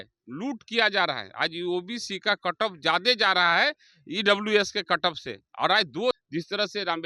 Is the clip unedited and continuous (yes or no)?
no